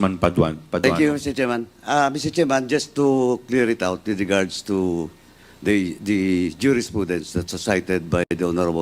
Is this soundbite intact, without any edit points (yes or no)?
yes